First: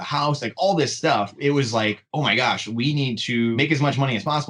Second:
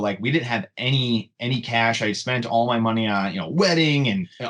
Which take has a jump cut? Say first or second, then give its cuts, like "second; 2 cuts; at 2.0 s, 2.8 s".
first; 2 cuts; at 1.3 s, 3.5 s